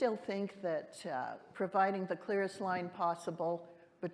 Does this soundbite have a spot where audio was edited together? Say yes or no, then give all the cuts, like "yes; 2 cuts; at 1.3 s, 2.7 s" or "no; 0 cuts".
no; 0 cuts